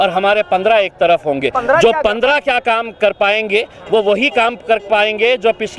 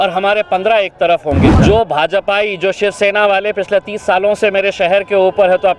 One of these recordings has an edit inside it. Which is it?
second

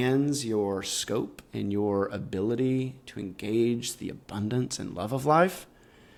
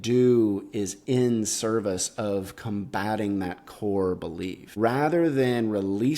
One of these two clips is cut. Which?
second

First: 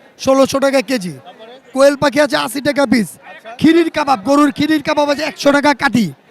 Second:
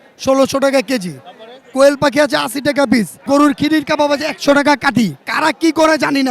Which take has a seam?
second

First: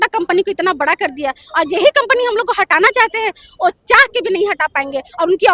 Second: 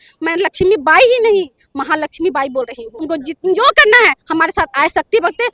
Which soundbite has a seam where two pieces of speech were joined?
second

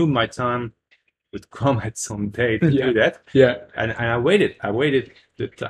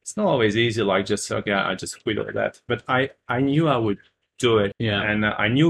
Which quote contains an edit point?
second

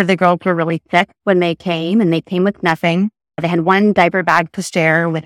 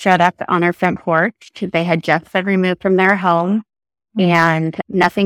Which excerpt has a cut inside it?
first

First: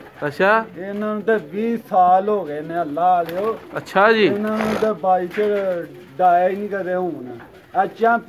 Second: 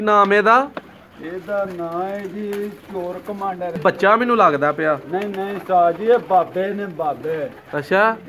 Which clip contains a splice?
second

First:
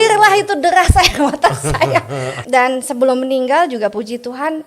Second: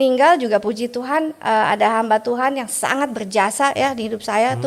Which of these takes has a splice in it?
first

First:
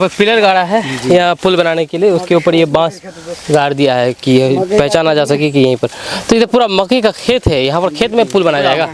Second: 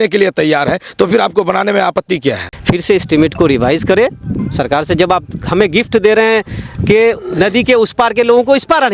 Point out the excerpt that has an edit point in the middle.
second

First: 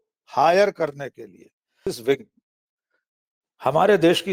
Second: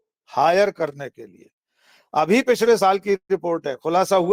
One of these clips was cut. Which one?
first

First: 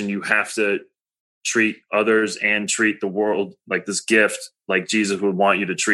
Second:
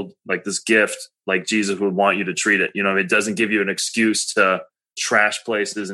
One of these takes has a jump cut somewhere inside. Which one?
second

